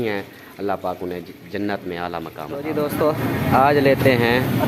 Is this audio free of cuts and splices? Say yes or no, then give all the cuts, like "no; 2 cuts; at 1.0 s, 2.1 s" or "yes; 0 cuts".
no; 1 cut; at 2.7 s